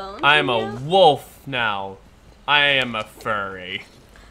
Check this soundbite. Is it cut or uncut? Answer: uncut